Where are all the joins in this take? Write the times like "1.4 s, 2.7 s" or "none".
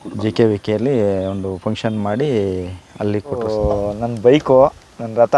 3.3 s